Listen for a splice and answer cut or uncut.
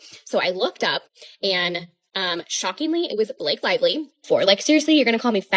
cut